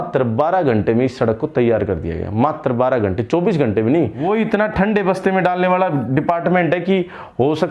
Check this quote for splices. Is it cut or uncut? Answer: cut